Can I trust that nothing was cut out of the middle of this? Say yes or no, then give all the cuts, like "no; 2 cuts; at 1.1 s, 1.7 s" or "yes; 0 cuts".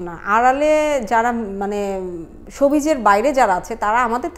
yes; 0 cuts